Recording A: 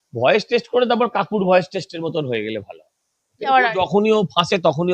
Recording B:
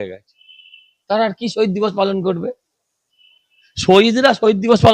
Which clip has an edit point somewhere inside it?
A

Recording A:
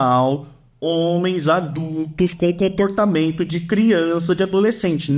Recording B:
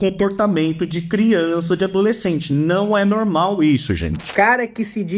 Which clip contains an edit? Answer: B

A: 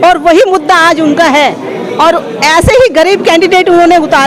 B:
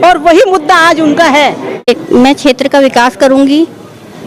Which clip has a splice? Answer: B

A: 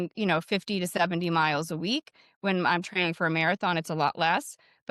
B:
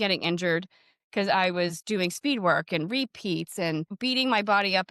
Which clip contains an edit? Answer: B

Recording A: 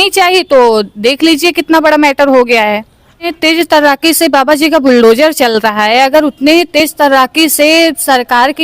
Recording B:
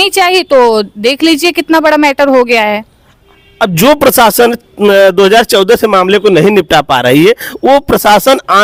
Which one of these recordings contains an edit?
A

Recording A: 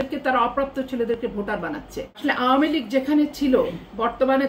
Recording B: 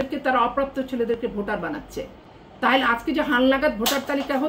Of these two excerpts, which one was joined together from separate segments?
A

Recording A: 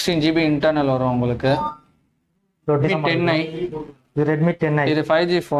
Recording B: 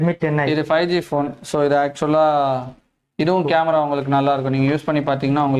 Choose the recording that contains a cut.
A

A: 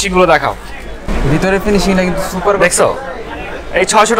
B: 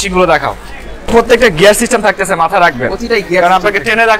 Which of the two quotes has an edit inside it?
B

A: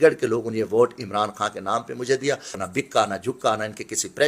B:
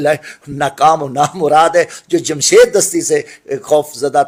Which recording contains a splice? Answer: A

